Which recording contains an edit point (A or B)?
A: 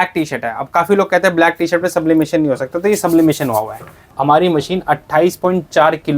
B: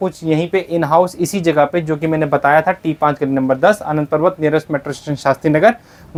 A